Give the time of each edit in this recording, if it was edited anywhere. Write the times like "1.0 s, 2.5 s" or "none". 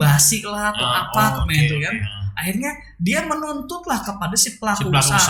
none

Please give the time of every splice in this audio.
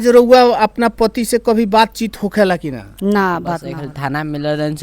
3.6 s

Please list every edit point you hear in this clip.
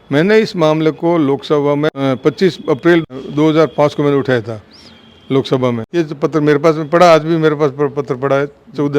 1.9 s, 3.1 s, 5.8 s

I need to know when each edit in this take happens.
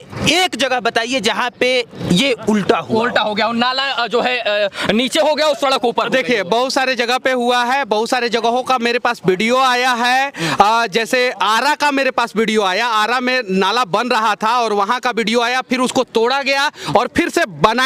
none

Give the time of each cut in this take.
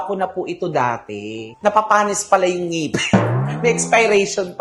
none

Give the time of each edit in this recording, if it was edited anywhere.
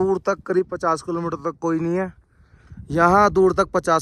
none

